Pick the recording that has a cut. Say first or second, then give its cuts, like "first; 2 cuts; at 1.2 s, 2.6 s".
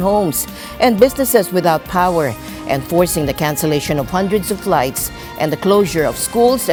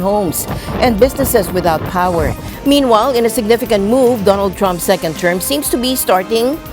second; 1 cut; at 2.5 s